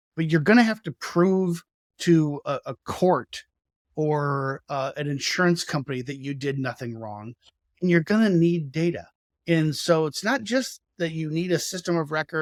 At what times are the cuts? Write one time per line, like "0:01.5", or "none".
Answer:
none

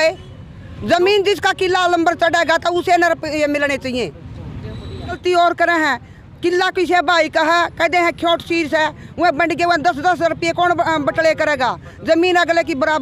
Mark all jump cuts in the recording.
0:05.2

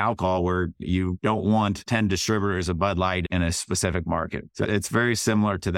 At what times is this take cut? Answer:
0:00.8
0:01.8
0:03.3
0:04.4

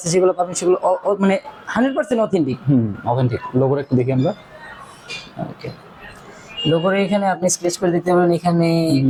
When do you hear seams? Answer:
none

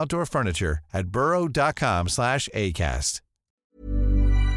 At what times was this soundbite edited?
0:03.6

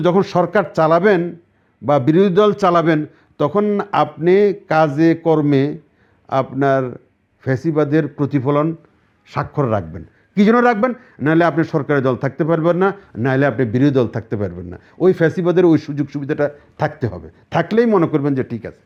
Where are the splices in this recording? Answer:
none

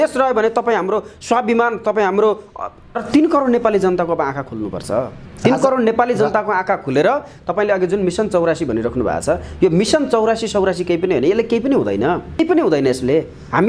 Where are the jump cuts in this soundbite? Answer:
0:03.0
0:12.4

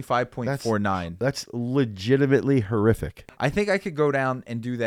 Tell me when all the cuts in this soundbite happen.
0:03.1

